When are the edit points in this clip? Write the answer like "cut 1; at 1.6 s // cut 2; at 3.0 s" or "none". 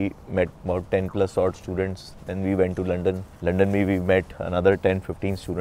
none